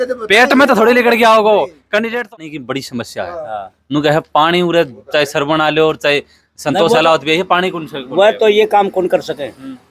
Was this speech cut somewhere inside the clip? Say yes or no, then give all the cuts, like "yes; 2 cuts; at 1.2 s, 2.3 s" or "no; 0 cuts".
yes; 1 cut; at 2.3 s